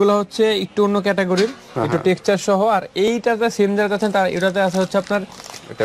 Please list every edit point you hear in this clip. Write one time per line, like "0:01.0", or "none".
none